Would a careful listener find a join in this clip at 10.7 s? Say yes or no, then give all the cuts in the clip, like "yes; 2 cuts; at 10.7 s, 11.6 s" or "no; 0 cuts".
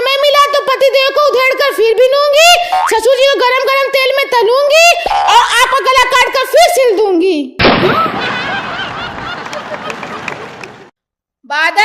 yes; 1 cut; at 10.7 s